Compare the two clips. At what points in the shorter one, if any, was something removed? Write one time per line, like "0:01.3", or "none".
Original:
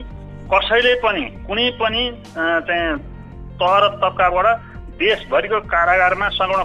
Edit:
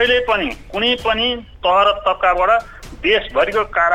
0:01.5

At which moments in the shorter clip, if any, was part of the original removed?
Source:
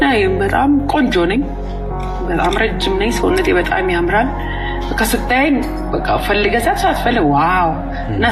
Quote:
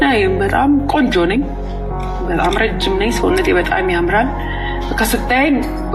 none

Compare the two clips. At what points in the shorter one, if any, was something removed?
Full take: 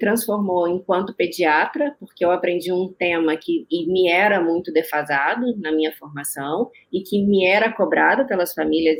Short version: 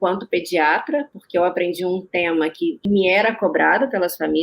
0:02.8

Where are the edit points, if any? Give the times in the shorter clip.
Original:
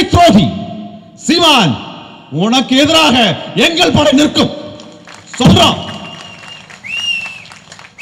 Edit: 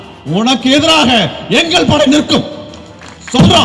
none

